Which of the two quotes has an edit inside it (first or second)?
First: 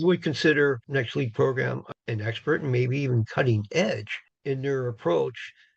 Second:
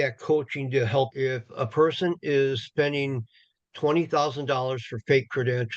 second